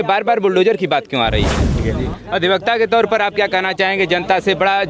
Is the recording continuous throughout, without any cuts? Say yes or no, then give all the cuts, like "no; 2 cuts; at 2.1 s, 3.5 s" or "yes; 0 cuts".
no; 1 cut; at 1.8 s